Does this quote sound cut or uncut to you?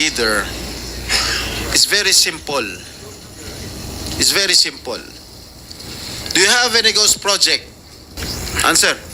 cut